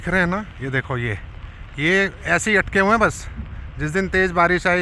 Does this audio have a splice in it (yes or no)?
no